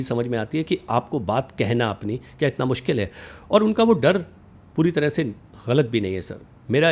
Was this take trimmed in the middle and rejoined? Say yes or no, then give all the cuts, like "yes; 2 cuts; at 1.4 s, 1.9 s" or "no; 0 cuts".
no; 0 cuts